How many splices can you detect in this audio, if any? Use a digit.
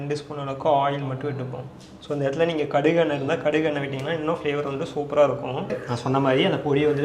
1